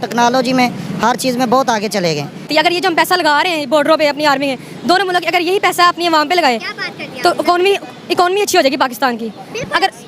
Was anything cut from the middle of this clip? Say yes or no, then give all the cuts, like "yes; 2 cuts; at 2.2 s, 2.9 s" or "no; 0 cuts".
yes; 1 cut; at 2.5 s